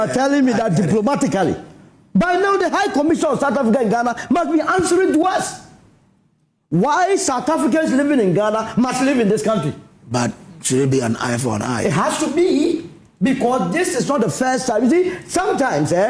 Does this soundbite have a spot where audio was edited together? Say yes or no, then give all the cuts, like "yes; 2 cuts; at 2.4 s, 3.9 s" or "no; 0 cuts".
no; 0 cuts